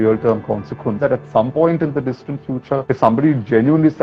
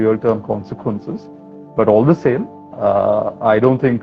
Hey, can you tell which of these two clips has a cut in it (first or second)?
first